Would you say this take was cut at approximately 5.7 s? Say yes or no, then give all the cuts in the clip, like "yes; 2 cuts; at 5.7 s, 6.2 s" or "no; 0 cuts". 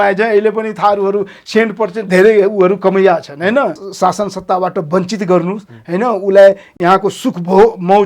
no; 1 cut; at 3.8 s